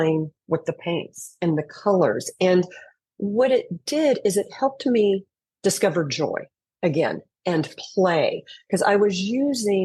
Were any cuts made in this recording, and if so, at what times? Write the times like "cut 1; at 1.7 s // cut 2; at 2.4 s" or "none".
none